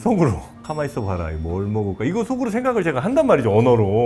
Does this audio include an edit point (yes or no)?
no